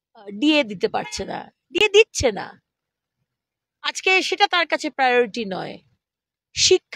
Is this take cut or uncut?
uncut